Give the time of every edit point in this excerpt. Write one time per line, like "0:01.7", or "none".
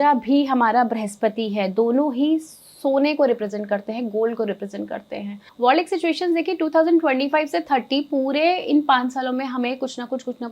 0:05.4